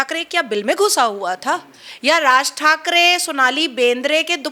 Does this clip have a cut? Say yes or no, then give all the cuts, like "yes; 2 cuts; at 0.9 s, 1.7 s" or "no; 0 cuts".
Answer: no; 0 cuts